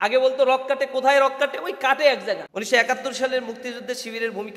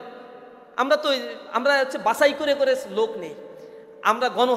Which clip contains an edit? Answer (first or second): first